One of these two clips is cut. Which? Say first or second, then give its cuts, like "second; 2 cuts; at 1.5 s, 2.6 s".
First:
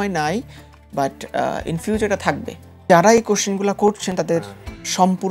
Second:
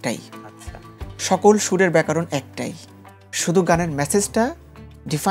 first; 1 cut; at 2.8 s